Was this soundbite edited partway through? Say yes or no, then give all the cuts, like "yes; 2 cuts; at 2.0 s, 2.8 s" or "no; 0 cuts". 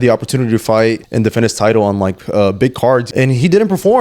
yes; 2 cuts; at 1.0 s, 3.1 s